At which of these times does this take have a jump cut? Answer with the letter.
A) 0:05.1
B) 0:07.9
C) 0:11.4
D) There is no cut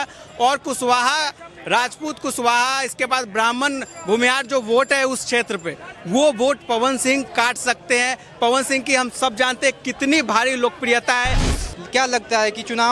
C